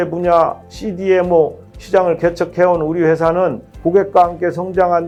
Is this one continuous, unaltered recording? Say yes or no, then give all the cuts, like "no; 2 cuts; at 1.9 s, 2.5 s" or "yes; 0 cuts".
yes; 0 cuts